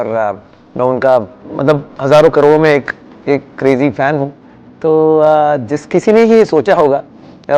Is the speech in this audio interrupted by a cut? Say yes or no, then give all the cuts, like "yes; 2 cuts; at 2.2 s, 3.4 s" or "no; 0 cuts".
yes; 1 cut; at 1.4 s